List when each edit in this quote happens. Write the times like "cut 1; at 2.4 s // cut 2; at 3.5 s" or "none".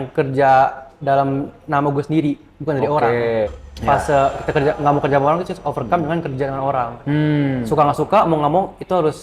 cut 1; at 3.7 s